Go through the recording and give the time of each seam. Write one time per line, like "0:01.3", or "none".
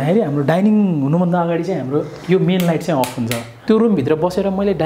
0:03.5